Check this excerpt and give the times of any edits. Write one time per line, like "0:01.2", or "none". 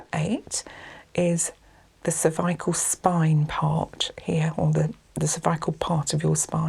none